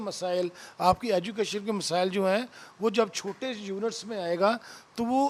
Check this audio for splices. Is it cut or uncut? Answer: uncut